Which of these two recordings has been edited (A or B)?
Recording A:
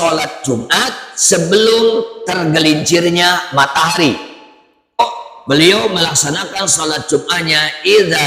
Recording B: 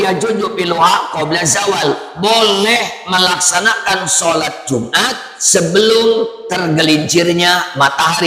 A